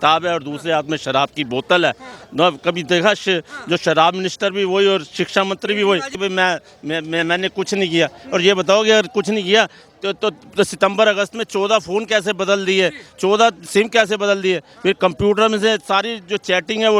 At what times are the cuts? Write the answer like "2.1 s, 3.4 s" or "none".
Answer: 6.1 s